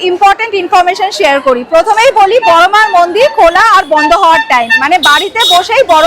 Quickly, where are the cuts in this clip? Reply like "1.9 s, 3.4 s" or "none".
4.8 s